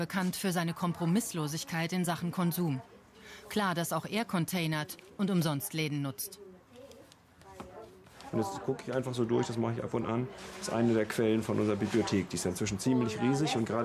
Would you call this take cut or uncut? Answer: cut